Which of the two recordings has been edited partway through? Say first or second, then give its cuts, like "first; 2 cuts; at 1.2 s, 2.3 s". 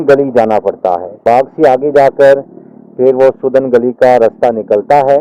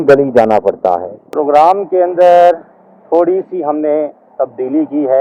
second; 1 cut; at 1.1 s